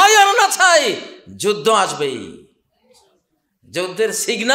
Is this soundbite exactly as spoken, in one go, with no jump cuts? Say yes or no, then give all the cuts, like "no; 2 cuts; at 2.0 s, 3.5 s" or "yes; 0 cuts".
yes; 0 cuts